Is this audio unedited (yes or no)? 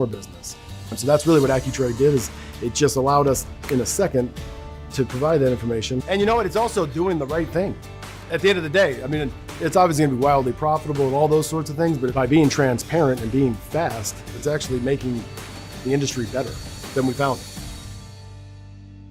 yes